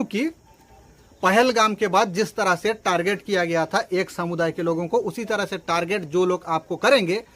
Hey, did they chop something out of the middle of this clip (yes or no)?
no